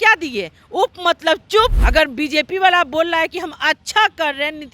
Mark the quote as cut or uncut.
cut